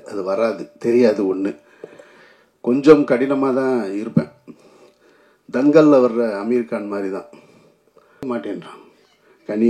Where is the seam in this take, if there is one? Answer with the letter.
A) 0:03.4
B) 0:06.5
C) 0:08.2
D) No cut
C